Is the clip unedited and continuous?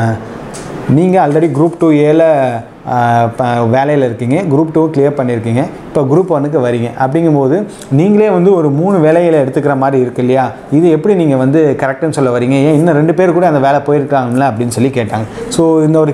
yes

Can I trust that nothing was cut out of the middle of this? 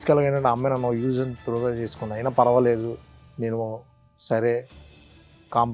yes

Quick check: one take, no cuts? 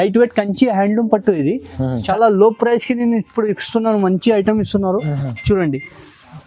no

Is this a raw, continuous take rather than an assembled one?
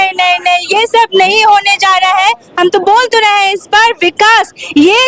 yes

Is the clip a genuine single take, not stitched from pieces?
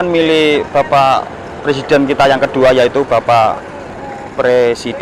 yes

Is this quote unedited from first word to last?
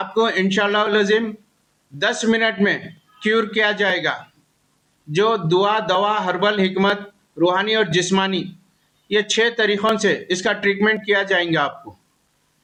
yes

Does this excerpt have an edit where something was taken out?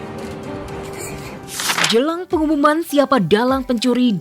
yes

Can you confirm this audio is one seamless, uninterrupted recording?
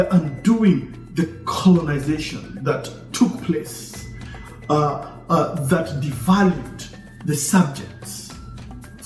yes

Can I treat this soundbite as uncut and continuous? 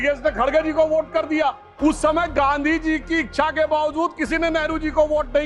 no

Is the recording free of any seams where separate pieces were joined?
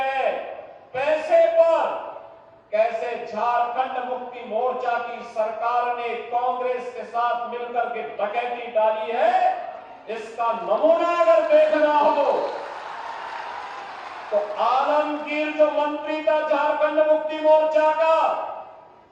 yes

